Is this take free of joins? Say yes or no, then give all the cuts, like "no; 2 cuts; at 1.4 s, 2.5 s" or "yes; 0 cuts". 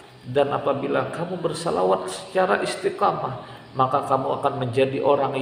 yes; 0 cuts